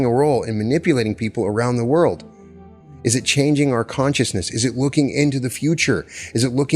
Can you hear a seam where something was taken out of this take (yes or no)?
no